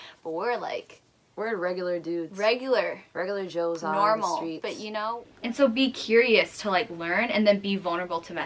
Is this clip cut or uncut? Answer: cut